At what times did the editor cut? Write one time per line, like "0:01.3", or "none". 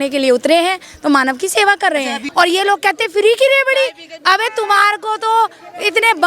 0:02.2